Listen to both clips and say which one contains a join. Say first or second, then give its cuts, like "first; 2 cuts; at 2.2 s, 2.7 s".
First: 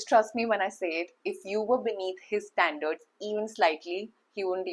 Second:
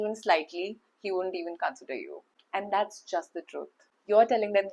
second; 1 cut; at 3.8 s